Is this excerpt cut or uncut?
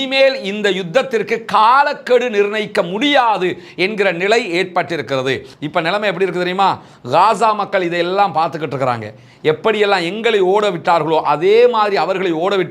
cut